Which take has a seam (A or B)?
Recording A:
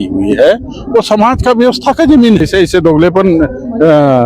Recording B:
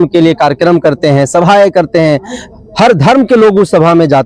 A